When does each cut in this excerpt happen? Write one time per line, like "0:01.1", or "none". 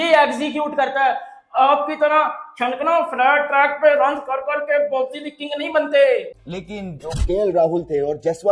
0:06.3